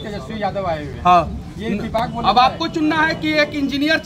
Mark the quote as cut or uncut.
uncut